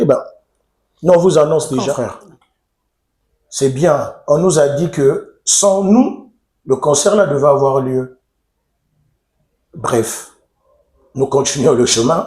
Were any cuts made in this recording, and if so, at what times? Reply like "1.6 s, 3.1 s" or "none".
1.9 s

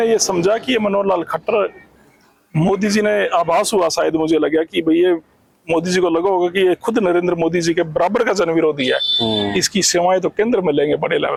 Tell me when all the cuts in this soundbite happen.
none

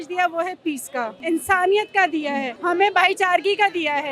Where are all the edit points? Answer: 1.2 s, 2.5 s

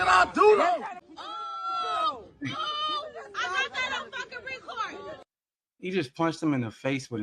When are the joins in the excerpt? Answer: 1.1 s

